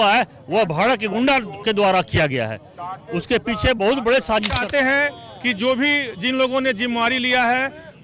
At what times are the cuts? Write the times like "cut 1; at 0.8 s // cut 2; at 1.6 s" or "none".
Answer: cut 1; at 4.6 s